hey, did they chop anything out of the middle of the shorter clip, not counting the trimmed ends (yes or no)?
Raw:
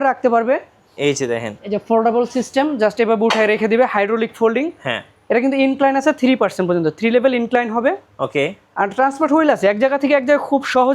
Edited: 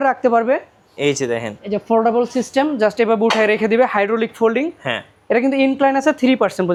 no